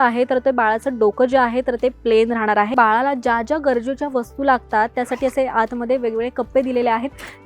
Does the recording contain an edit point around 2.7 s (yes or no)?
yes